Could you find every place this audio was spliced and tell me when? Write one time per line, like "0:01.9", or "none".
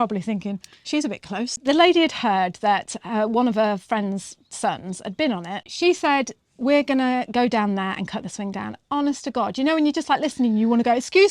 0:01.6
0:05.7